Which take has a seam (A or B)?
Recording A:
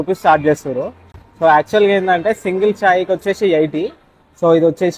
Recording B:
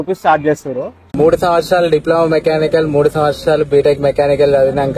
B